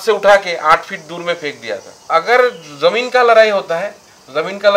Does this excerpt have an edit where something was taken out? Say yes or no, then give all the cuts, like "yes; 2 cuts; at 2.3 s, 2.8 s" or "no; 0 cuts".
yes; 1 cut; at 2.1 s